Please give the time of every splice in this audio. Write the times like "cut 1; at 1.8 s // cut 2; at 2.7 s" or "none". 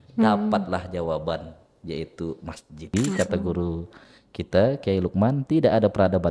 cut 1; at 2.9 s